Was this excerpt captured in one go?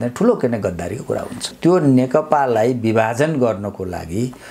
no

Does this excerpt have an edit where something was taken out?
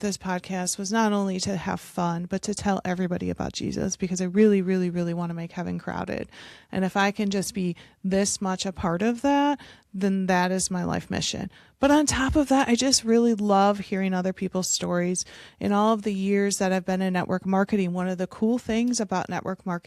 no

